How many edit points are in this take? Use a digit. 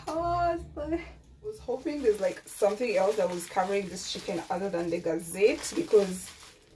1